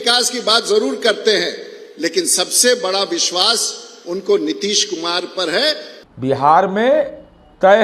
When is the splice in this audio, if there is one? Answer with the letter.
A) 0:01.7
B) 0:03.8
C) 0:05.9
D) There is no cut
C